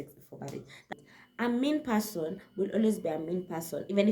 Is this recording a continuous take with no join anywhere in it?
no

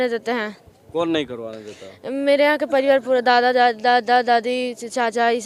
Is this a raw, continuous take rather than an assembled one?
yes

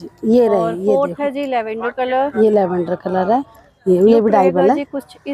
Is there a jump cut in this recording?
yes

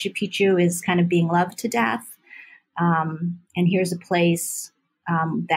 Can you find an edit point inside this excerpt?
no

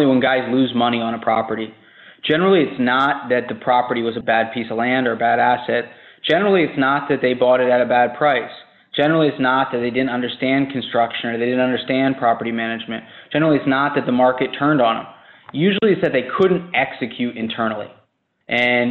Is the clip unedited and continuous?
yes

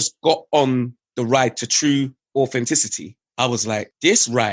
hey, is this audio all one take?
no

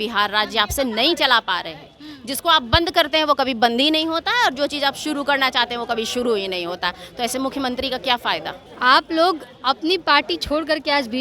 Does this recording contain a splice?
no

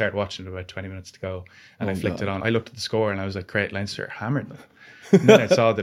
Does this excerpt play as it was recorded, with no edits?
no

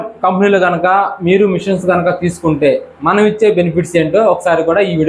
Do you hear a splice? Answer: no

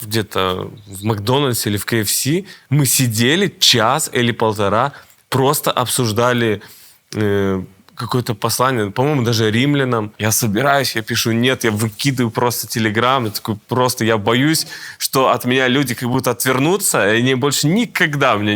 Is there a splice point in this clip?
yes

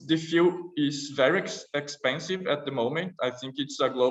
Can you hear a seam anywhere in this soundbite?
no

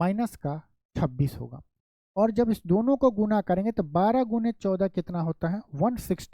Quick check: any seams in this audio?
no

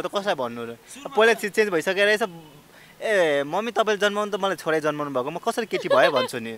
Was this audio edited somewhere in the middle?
no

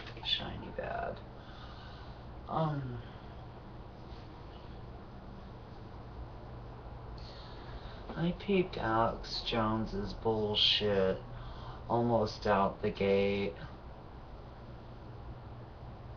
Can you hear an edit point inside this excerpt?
no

